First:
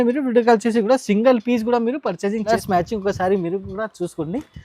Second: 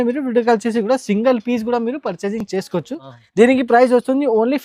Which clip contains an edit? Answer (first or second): first